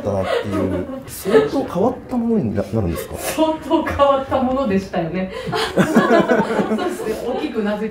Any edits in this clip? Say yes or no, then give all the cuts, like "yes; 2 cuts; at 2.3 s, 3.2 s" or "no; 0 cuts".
no; 0 cuts